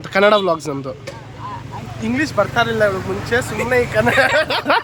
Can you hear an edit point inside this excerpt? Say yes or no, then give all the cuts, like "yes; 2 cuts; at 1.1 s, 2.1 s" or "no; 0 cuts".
no; 0 cuts